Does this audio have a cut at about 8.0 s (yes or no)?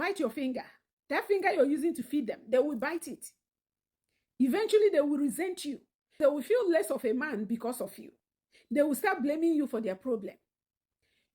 no